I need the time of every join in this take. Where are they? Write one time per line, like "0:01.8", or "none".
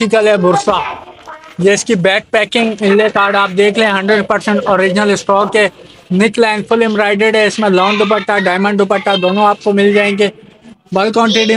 none